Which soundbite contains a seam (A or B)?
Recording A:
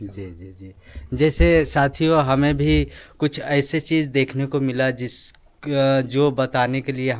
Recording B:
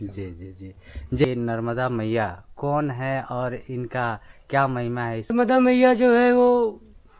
B